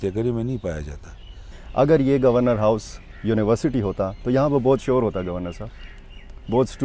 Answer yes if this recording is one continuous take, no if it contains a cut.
no